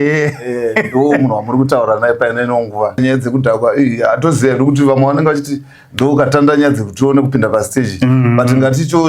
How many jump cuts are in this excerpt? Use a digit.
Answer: 1